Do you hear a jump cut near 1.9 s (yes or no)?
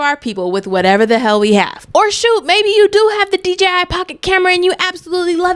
yes